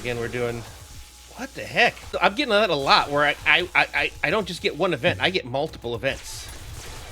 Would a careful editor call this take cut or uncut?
cut